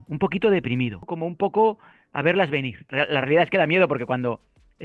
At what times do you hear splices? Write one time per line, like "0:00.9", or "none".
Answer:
0:01.1
0:02.8